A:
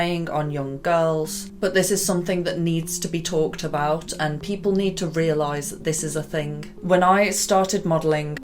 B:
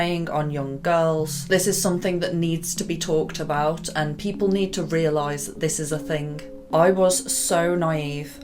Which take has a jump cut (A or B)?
B